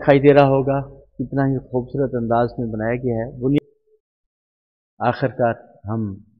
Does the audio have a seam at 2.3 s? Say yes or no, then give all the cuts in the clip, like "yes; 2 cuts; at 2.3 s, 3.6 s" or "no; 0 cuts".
no; 1 cut; at 3.6 s